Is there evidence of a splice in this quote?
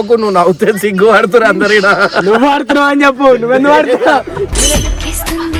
no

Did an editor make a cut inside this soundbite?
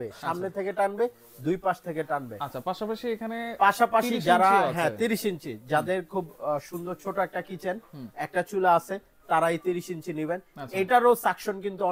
no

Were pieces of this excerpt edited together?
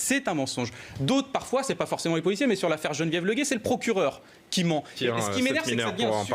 yes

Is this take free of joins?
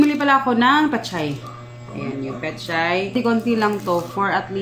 no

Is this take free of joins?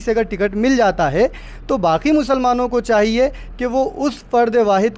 yes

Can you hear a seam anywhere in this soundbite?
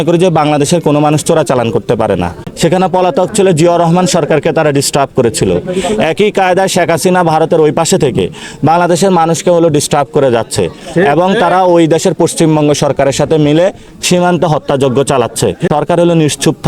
yes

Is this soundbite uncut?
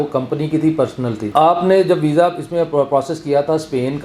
no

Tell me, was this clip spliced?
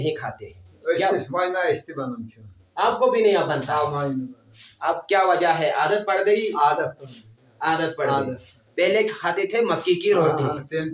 no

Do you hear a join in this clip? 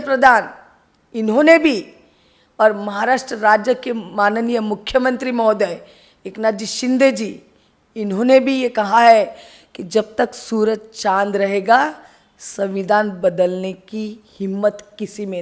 no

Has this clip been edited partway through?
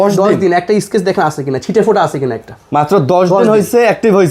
no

